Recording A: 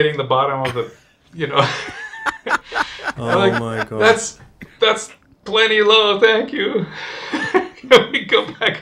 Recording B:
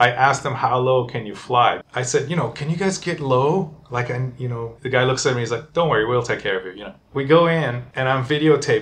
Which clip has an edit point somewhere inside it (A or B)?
B